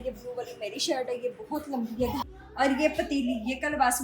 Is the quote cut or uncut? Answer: cut